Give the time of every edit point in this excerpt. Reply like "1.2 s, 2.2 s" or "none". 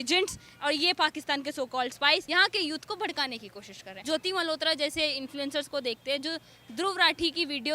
2.2 s, 3.9 s